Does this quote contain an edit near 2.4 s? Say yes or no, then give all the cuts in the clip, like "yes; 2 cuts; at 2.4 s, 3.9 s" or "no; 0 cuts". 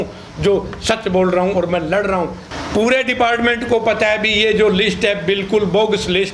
yes; 1 cut; at 2.4 s